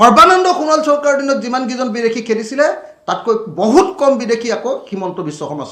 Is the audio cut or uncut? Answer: uncut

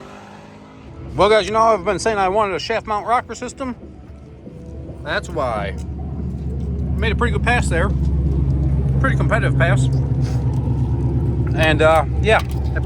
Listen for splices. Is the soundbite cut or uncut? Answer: cut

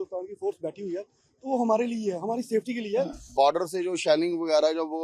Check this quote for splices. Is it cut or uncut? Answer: cut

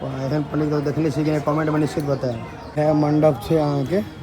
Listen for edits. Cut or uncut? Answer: cut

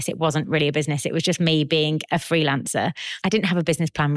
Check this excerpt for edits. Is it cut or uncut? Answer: cut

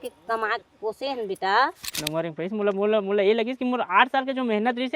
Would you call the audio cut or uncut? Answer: cut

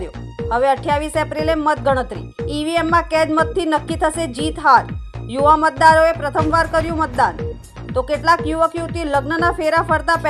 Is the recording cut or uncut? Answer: uncut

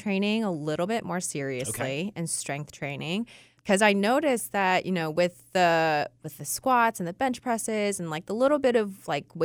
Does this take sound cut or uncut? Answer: uncut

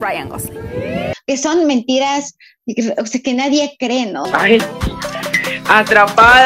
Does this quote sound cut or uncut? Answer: uncut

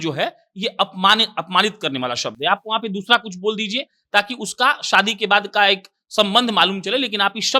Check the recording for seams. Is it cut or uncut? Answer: uncut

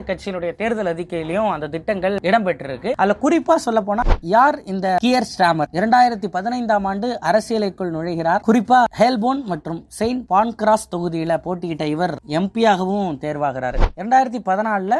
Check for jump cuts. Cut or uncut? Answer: cut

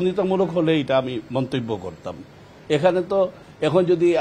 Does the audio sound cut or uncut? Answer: uncut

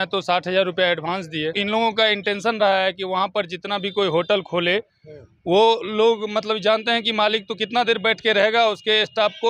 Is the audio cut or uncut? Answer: cut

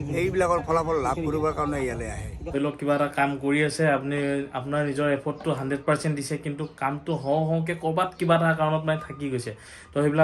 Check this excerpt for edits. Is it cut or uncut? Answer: cut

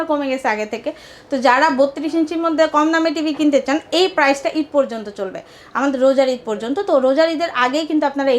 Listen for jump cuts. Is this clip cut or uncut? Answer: uncut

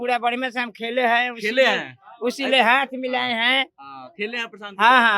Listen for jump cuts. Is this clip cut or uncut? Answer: uncut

